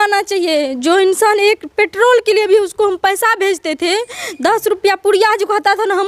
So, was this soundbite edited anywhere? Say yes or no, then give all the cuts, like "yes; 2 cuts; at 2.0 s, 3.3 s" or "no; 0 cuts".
no; 0 cuts